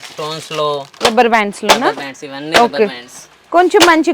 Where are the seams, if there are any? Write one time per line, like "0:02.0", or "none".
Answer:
0:00.9